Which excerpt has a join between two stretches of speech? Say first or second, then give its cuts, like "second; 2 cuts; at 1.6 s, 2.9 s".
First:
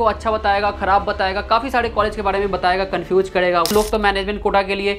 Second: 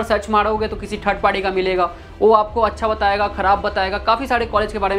first; 1 cut; at 3.7 s